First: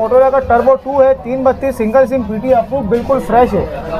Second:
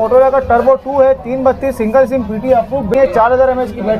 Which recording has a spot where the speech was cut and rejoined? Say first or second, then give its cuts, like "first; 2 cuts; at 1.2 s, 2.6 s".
second; 1 cut; at 2.9 s